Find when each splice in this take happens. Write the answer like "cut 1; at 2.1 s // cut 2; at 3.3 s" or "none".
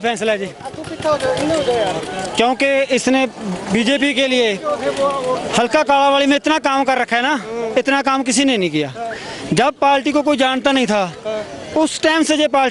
none